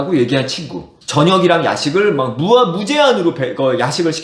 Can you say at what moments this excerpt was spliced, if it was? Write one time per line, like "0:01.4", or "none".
0:00.9